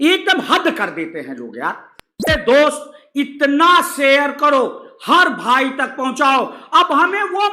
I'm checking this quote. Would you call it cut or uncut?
cut